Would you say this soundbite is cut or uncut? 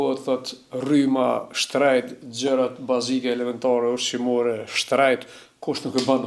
uncut